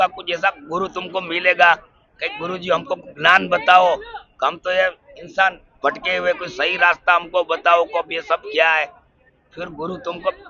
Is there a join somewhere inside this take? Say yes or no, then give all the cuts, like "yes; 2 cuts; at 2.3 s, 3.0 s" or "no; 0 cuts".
no; 0 cuts